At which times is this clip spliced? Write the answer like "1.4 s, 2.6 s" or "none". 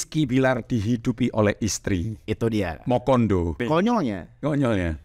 3.6 s